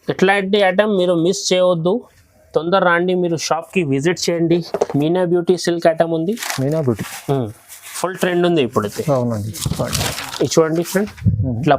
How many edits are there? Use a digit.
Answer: 1